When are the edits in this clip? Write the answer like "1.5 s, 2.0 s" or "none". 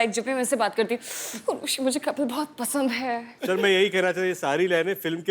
3.3 s